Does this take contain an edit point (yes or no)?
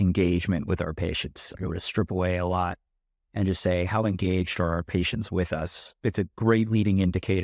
yes